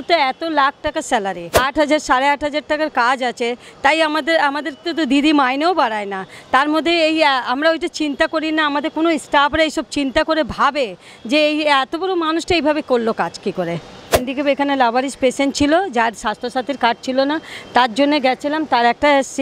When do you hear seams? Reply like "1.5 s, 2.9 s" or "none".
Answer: 1.6 s, 14.2 s